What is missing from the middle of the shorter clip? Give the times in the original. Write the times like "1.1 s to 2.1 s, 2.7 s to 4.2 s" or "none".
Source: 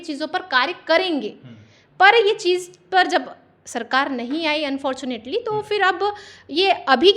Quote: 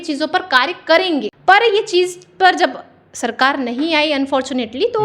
1.3 s to 1.9 s

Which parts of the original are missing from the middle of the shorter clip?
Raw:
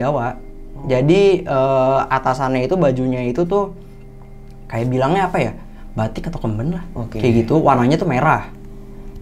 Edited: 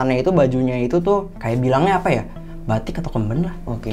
3.8 s to 4.6 s

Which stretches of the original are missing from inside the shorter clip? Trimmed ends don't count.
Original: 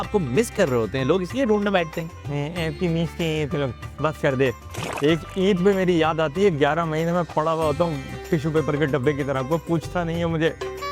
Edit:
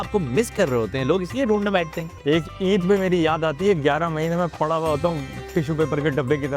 2.1 s to 4.8 s

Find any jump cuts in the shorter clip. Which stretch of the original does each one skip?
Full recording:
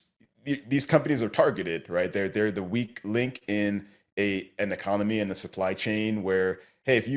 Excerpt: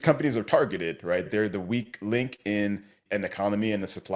2.1 s to 2.3 s, 4.0 s to 4.5 s

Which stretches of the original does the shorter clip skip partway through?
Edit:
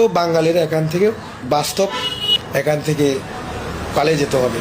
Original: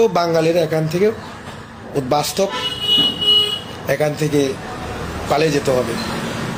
1.4 s to 2.0 s, 2.9 s to 3.6 s

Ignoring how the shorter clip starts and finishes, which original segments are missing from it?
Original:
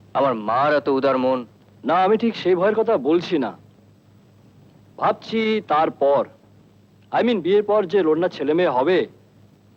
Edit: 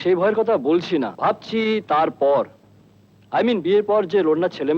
3.5 s to 4.9 s

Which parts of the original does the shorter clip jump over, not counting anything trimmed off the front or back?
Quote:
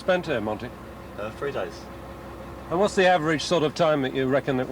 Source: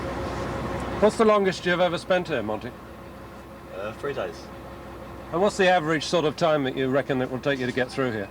3.2 s to 3.8 s

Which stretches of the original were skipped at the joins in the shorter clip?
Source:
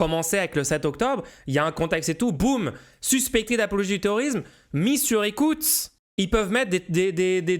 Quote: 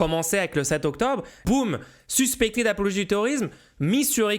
1.4 s to 2.4 s

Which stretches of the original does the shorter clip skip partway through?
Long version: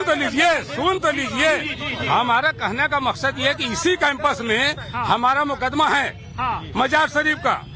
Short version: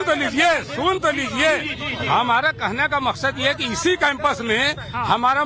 none

